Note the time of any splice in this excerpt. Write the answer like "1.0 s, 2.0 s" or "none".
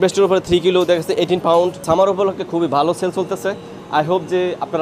1.8 s